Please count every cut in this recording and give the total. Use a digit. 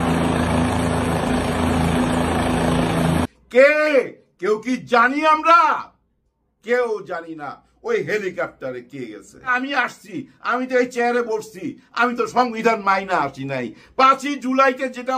1